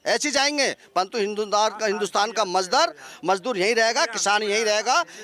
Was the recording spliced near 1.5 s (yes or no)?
no